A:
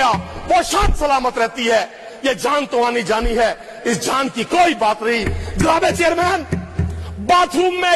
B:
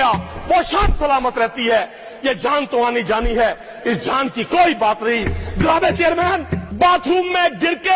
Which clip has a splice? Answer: B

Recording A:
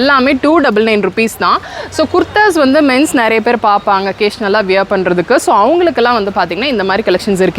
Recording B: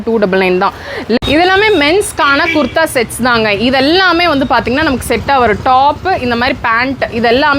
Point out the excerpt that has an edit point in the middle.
B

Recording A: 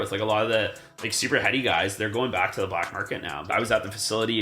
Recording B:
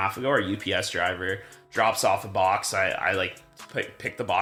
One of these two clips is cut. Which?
A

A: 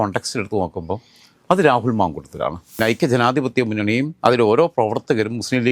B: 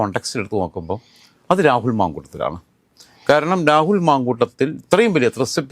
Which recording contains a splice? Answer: A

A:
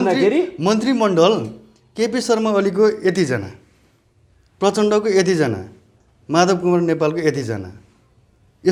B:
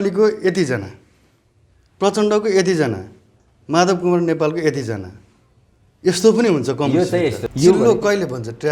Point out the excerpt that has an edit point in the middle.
B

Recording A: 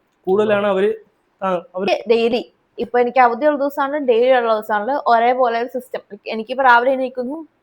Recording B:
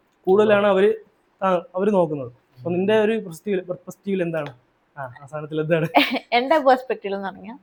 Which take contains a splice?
A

